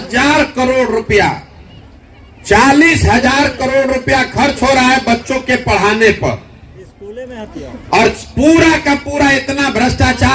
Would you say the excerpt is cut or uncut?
uncut